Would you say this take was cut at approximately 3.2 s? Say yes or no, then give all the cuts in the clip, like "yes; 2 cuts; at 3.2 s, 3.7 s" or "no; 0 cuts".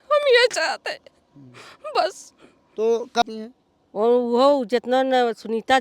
yes; 1 cut; at 3.2 s